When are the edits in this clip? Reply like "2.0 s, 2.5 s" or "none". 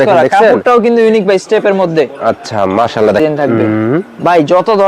3.2 s